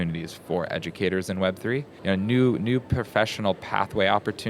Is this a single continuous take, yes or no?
no